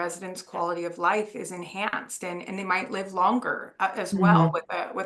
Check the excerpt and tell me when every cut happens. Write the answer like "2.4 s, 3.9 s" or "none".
none